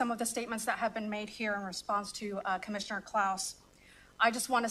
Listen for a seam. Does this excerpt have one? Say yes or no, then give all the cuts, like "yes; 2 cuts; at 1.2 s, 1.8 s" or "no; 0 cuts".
no; 0 cuts